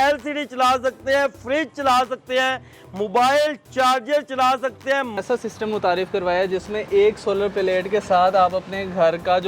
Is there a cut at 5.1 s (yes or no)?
yes